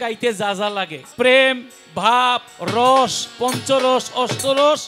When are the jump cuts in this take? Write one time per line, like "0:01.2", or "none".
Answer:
0:01.0